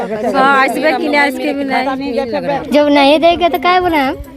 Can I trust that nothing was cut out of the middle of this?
no; 1 cut; at 2.6 s

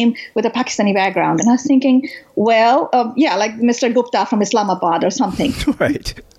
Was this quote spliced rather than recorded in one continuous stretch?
no; 0 cuts

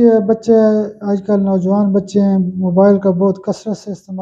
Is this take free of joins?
yes; 0 cuts

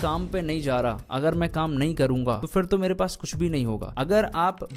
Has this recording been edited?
yes; 2 cuts; at 2.4 s, 3.9 s

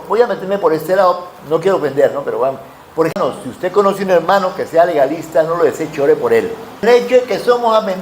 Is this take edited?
yes; 2 cuts; at 3.1 s, 6.8 s

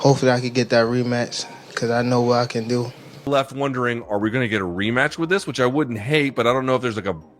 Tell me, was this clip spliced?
yes; 1 cut; at 3.3 s

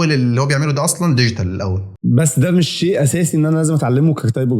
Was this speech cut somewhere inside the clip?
yes; 1 cut; at 1.9 s

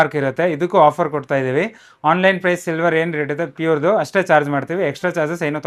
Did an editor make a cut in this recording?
no; 0 cuts

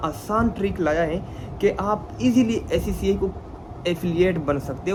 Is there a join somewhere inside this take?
no; 0 cuts

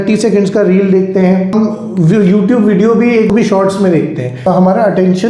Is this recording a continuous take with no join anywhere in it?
no; 3 cuts; at 1.5 s, 3.3 s, 4.4 s

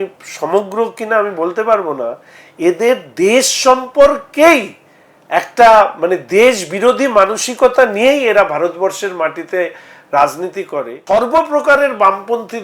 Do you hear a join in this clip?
yes; 1 cut; at 11.0 s

